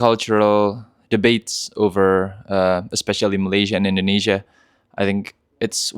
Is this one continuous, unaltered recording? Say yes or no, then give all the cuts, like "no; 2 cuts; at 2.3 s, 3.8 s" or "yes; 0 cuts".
yes; 0 cuts